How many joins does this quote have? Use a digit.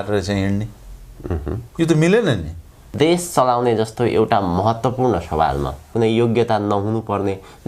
2